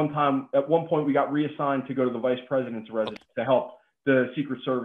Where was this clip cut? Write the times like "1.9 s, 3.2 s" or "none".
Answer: 3.2 s